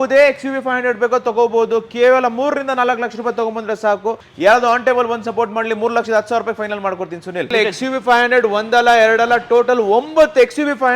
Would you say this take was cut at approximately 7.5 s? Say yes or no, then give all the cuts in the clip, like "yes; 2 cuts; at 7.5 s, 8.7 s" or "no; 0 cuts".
yes; 2 cuts; at 4.3 s, 7.5 s